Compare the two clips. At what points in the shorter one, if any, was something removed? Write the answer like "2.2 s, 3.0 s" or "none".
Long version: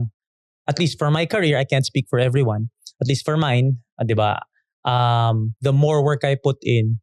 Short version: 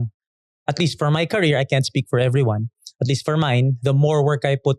3.8 s